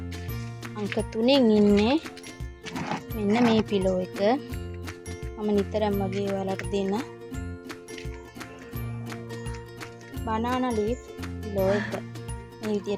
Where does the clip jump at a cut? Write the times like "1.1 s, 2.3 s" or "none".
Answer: 0.7 s, 7.3 s, 10.2 s